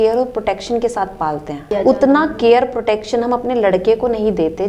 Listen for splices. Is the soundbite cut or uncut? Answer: cut